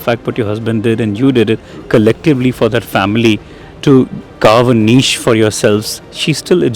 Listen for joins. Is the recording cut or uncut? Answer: uncut